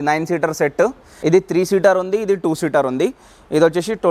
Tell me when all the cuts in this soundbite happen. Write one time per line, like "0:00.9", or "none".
0:01.1